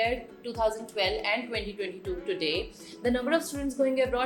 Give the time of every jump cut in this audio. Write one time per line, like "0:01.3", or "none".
none